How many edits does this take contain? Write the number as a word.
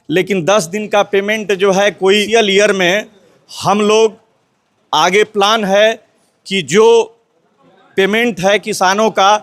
one